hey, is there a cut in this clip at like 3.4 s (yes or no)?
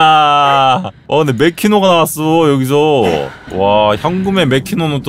yes